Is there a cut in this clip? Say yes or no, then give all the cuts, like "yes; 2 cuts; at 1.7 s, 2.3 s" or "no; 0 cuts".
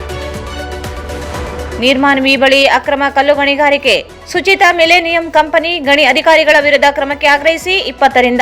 yes; 1 cut; at 1.6 s